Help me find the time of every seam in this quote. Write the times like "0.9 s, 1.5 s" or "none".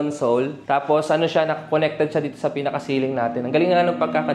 none